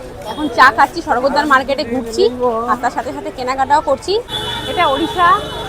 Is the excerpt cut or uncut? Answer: cut